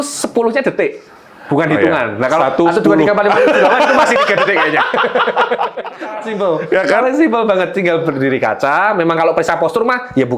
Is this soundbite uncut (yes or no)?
no